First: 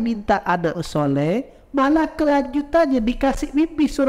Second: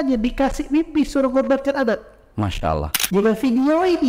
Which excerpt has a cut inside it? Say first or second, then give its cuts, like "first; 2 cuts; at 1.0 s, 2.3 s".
second; 1 cut; at 2.9 s